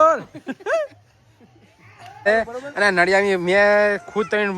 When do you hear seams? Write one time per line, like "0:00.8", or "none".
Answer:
0:02.3

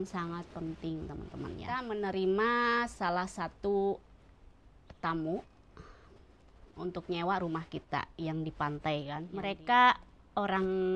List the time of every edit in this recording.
0:01.9
0:09.3

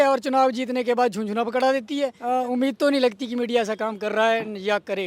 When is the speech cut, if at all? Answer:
0:02.2

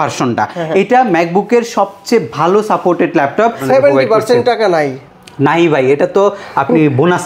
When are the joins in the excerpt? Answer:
0:03.6

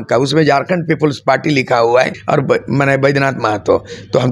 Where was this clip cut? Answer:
0:02.2

